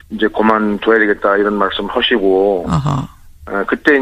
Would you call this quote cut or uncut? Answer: uncut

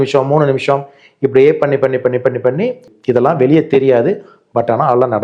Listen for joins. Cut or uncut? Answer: cut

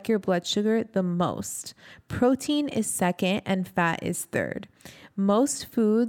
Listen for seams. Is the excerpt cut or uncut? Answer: uncut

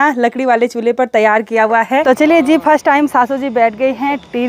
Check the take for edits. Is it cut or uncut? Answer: cut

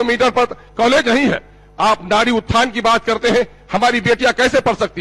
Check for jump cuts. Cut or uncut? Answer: uncut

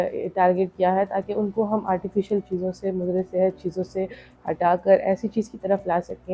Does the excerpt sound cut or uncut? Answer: uncut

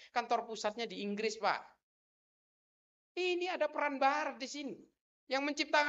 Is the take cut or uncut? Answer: uncut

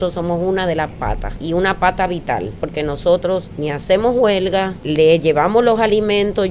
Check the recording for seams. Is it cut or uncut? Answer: cut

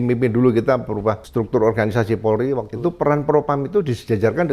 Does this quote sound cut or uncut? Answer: cut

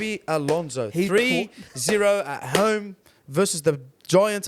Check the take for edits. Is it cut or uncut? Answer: uncut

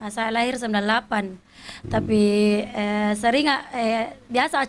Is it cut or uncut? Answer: uncut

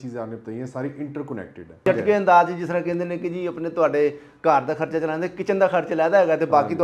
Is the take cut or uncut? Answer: cut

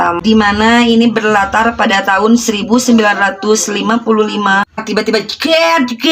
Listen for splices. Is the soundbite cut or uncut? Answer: cut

